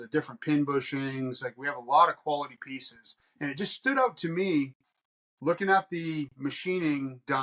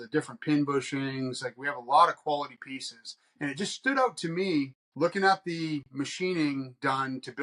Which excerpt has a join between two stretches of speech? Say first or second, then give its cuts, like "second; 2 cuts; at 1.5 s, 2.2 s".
second; 1 cut; at 4.8 s